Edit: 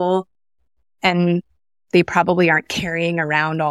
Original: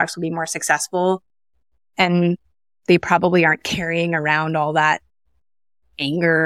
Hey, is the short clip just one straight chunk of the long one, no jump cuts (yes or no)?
yes